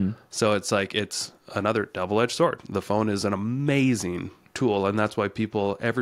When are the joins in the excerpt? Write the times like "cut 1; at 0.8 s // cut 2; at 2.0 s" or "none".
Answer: none